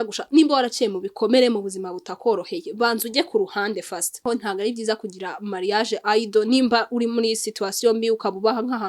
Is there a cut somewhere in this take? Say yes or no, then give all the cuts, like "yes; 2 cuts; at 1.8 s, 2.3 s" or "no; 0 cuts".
yes; 1 cut; at 4.2 s